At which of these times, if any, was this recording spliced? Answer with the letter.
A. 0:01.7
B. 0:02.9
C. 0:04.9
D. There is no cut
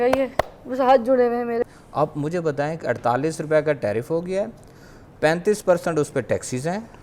A